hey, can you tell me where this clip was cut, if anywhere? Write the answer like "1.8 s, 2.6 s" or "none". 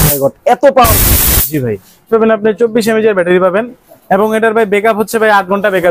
2.1 s